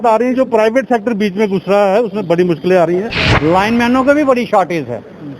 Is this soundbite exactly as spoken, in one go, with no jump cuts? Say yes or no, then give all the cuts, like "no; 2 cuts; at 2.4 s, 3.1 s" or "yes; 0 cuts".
no; 1 cut; at 3.2 s